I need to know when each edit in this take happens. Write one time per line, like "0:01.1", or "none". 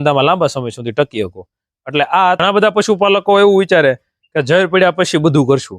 0:02.4